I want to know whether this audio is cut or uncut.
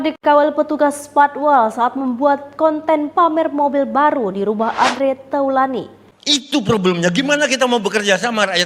cut